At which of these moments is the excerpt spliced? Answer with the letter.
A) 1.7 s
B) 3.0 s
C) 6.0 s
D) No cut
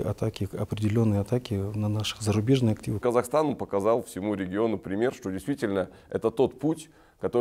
B